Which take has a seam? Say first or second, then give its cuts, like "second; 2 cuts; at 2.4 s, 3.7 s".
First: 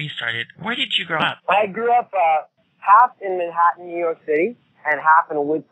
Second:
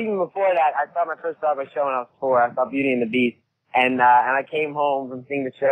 first; 1 cut; at 4.0 s